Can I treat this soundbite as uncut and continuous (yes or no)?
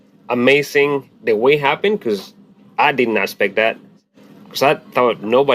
no